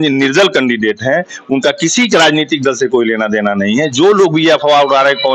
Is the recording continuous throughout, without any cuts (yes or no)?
yes